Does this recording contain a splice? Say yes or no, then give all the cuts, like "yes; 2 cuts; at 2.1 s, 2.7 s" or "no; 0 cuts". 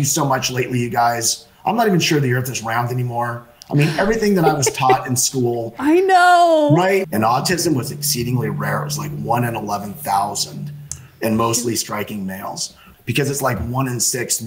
yes; 2 cuts; at 7.1 s, 12.9 s